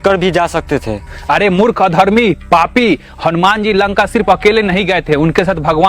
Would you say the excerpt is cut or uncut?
uncut